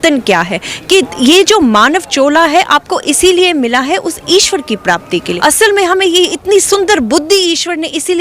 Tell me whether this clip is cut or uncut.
cut